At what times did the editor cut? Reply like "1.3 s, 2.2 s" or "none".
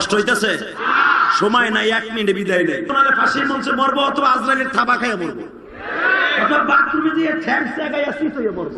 2.9 s